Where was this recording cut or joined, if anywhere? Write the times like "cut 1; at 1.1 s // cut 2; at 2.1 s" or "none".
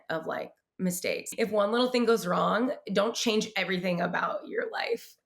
cut 1; at 1.3 s